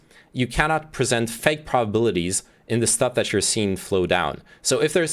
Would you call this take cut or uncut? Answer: uncut